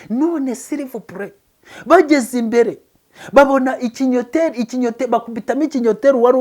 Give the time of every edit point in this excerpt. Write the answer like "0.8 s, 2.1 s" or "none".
none